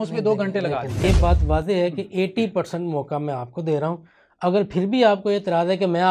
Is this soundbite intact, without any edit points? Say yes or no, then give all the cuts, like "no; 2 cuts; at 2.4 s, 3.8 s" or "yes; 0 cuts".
no; 1 cut; at 1.0 s